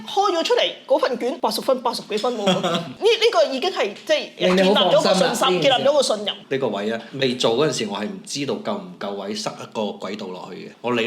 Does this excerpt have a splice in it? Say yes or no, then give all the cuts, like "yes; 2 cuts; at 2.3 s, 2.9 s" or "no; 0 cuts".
yes; 3 cuts; at 1.4 s, 2.9 s, 6.4 s